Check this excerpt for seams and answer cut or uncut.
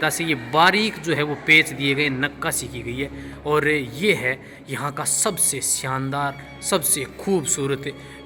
uncut